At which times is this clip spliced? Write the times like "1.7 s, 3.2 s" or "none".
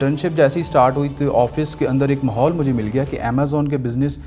none